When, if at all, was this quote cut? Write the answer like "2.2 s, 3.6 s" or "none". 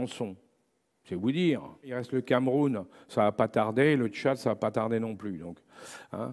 1.9 s